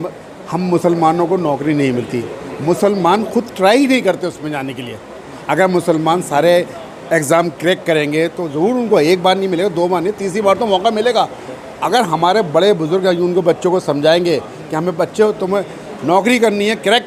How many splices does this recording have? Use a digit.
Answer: 0